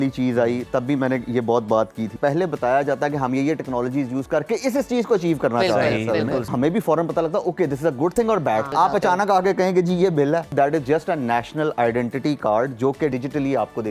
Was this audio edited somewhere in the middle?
yes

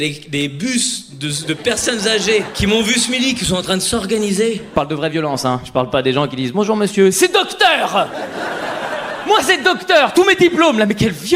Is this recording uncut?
no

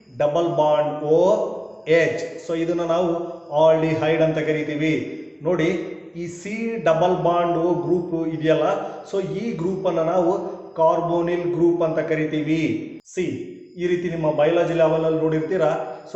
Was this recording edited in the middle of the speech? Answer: yes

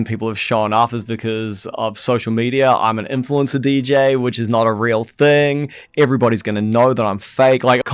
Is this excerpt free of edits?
yes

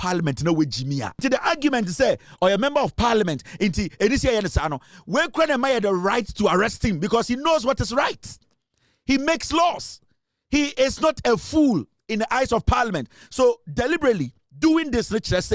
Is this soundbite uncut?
no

